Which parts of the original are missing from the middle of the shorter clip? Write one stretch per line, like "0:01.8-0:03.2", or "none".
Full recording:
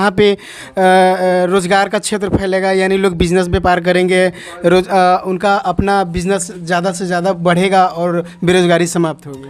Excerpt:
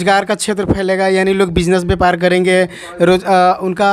none